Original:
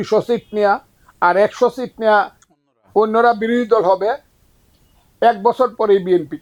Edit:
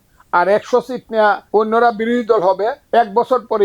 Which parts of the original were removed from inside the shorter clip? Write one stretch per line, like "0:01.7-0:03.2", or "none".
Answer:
0:02.3-0:02.8
0:04.2-0:05.1